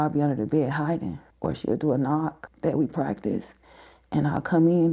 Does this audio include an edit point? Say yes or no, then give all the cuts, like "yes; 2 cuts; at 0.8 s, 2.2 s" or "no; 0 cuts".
yes; 2 cuts; at 1.2 s, 2.4 s